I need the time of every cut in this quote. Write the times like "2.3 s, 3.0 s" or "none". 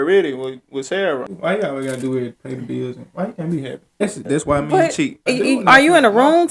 1.3 s, 4.0 s, 5.3 s